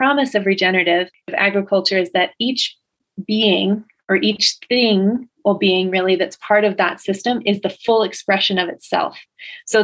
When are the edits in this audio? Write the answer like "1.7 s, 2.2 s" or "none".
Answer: 1.3 s